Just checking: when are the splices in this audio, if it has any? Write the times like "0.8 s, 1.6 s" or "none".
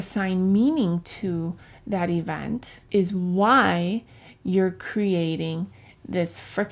2.8 s

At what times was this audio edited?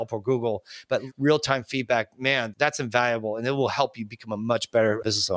1.1 s

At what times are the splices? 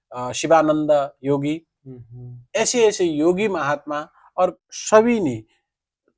4.7 s

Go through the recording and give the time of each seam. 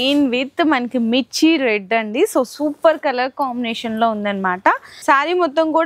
4.8 s

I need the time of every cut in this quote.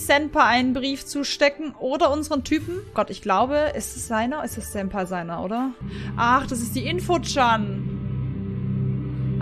2.9 s, 5.8 s

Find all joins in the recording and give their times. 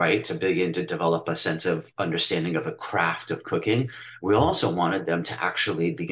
none

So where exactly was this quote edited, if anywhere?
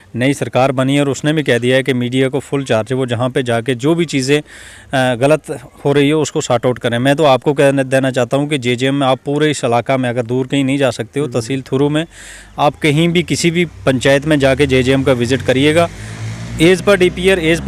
none

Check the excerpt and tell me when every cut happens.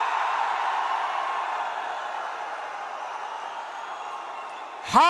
none

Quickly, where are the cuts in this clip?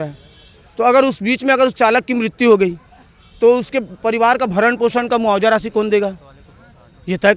none

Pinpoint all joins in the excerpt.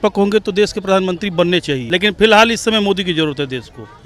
1.8 s

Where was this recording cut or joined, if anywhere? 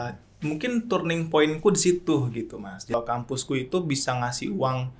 2.9 s

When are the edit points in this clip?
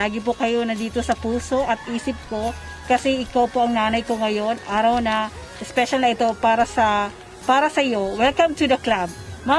none

